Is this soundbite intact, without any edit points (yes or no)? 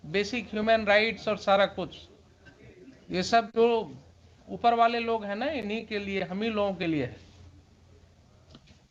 yes